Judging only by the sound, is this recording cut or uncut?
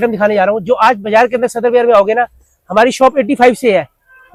uncut